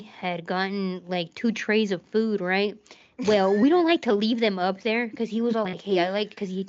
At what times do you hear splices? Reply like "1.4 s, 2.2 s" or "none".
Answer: none